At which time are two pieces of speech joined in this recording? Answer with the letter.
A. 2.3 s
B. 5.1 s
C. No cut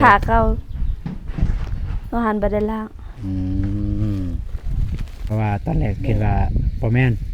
B